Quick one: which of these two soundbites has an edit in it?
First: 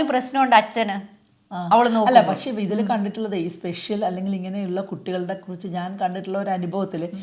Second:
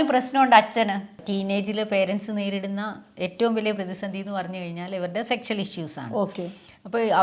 second; 1 cut; at 1.3 s

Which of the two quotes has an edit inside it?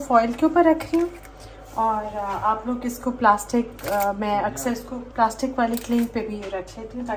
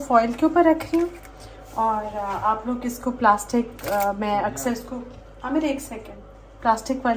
first; 1 cut; at 5.0 s

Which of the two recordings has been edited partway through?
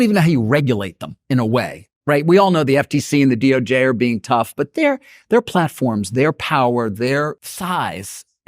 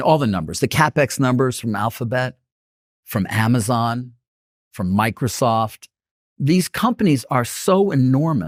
first; 1 cut; at 7.5 s

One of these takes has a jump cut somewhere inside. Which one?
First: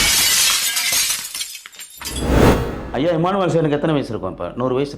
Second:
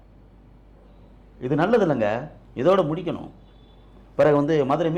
first; 2 cuts; at 2.2 s, 2.8 s

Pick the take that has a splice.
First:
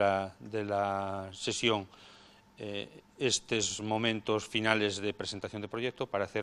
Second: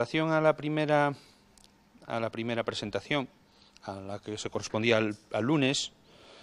first; 1 cut; at 4.2 s

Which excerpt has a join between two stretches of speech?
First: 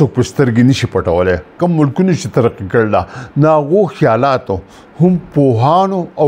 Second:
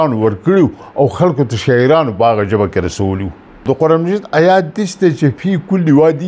first; 1 cut; at 1.5 s

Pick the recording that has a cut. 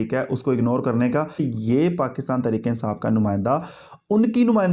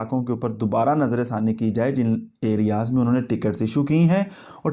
first; 1 cut; at 1.5 s

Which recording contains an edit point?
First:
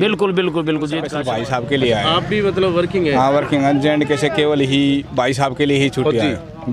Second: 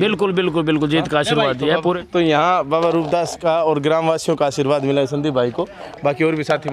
first; 1 cut; at 1.1 s

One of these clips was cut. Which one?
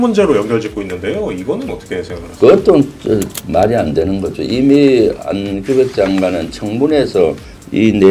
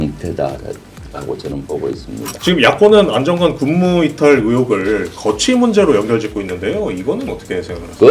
second; 1 cut; at 2.3 s

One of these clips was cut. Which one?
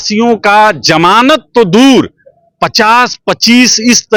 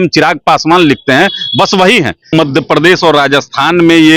second; 1 cut; at 2.3 s

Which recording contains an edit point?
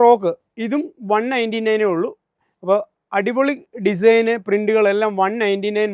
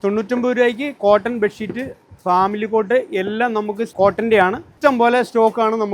second; 1 cut; at 3.9 s

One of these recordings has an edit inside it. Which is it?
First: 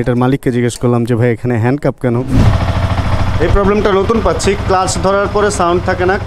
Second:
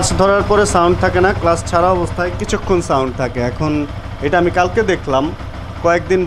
first; 1 cut; at 2.4 s

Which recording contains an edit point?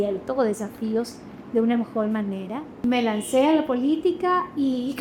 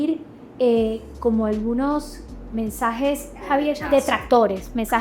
first; 1 cut; at 2.8 s

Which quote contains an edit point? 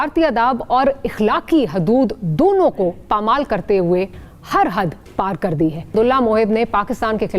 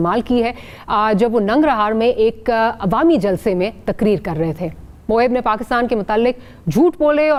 first; 2 cuts; at 4.2 s, 5.9 s

